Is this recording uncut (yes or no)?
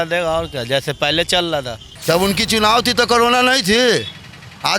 no